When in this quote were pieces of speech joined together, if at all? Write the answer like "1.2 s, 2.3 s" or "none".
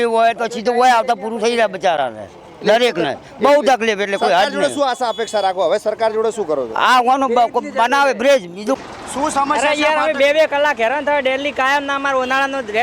8.8 s